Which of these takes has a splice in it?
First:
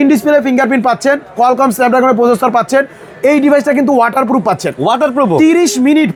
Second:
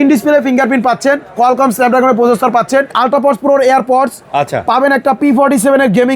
second; 1 cut; at 3.0 s

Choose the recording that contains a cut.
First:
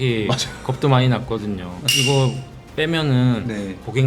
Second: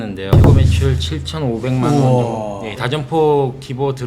second; 1 cut; at 2.7 s

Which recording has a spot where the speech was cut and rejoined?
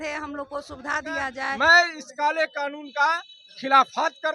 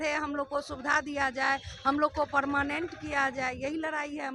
first; 1 cut; at 1.4 s

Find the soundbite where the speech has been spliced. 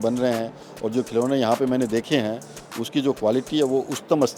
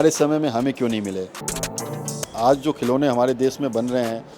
second; 1 cut; at 1.7 s

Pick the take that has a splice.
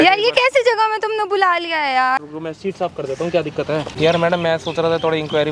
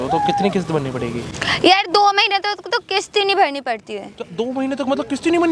first; 2 cuts; at 2.2 s, 3.9 s

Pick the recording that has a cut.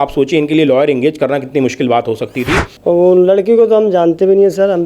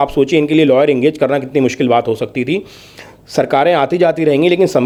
first; 1 cut; at 2.7 s

